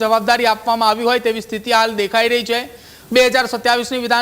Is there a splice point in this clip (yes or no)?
no